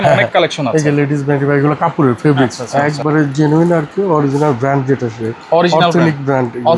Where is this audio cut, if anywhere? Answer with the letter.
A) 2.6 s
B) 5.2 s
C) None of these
A